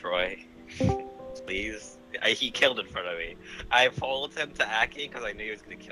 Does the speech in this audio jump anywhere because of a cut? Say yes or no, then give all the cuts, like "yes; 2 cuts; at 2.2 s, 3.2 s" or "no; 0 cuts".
no; 0 cuts